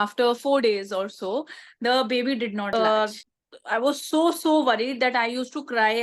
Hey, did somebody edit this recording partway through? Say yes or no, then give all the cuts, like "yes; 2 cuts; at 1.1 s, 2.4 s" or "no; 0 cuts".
yes; 1 cut; at 2.7 s